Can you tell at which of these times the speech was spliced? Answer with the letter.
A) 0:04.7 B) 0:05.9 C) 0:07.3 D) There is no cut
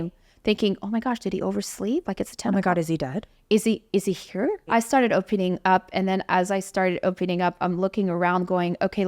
A